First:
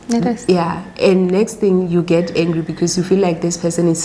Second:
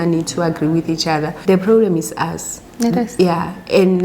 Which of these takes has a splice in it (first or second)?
second